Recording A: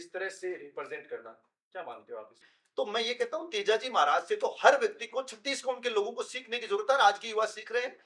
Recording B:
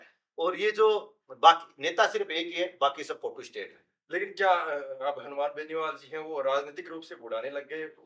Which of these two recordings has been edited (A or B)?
A